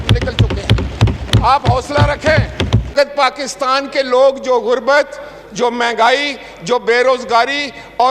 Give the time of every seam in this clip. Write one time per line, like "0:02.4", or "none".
0:02.9